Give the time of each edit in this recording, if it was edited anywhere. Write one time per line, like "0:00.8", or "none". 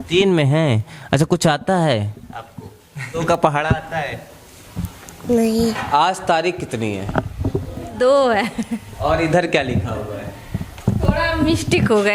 0:03.2
0:05.8
0:07.9

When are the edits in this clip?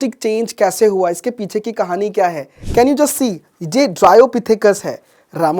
0:02.5

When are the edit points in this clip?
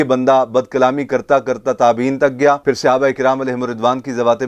none

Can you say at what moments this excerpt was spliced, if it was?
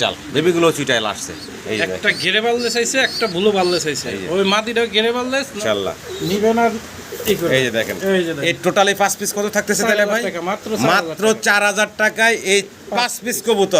0:05.5

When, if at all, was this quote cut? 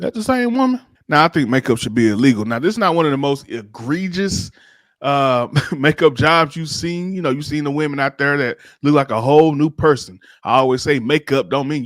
0:00.9

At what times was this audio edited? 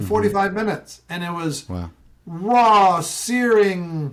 none

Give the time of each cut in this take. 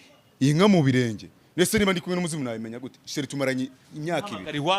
none

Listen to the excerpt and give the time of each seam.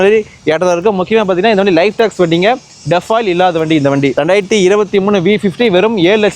none

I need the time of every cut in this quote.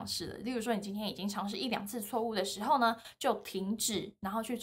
none

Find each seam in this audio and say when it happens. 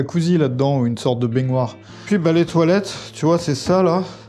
0:02.0

